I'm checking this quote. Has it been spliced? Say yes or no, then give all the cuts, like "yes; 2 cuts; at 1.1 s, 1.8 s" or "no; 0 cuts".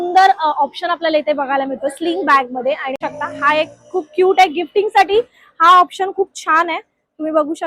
yes; 1 cut; at 3.0 s